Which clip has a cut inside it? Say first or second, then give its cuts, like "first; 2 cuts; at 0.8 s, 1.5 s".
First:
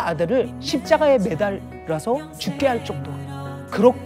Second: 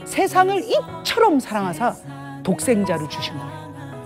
second; 1 cut; at 3.0 s